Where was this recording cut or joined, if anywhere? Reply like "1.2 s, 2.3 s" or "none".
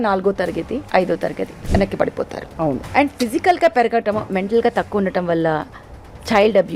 0.9 s, 1.5 s, 2.8 s